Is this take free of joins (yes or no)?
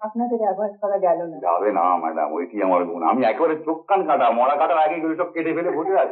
yes